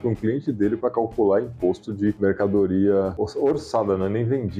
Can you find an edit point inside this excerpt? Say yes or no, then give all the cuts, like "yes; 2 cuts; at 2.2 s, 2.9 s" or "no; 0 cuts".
yes; 2 cuts; at 2.2 s, 3.2 s